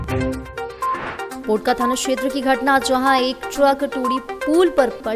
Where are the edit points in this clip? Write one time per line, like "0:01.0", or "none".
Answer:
0:01.3